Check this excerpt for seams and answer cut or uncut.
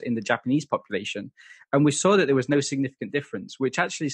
uncut